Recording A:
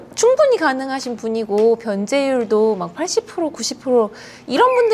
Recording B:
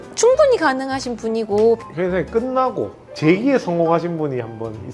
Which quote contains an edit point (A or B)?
B